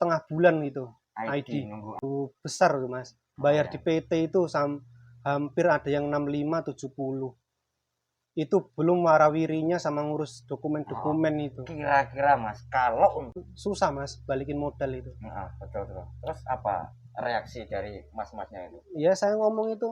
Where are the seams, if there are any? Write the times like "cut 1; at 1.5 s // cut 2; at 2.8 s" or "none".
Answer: cut 1; at 2.0 s // cut 2; at 13.4 s